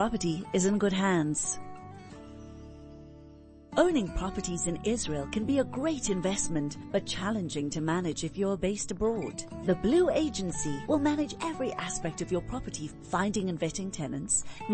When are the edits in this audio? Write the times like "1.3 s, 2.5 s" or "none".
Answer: 1.4 s, 3.6 s